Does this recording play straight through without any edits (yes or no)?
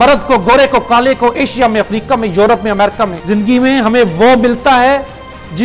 no